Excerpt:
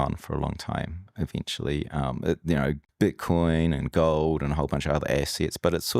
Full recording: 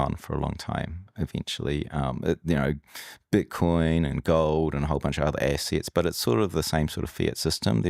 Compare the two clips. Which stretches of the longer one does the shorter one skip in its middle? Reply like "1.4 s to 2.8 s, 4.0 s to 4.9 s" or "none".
2.9 s to 3.2 s